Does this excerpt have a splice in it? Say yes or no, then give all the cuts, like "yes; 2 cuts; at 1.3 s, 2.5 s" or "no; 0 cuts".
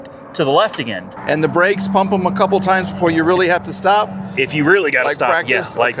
yes; 1 cut; at 1.1 s